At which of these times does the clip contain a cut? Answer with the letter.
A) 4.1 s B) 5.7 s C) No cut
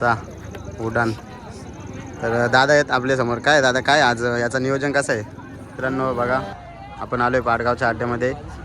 B